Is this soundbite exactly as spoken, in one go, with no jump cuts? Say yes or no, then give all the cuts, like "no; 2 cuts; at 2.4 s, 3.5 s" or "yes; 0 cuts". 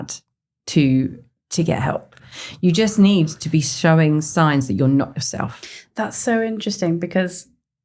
yes; 0 cuts